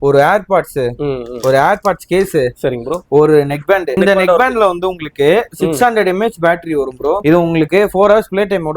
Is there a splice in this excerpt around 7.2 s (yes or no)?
yes